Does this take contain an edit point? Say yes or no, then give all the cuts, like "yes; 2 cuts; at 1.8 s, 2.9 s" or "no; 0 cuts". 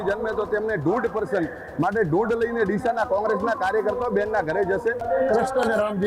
yes; 1 cut; at 5.0 s